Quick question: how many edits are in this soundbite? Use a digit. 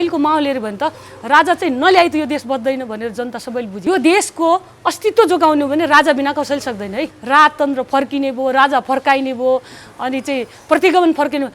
2